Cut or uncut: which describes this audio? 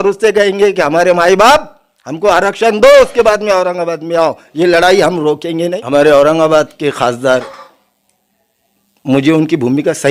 cut